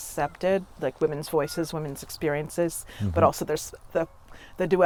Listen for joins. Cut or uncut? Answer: uncut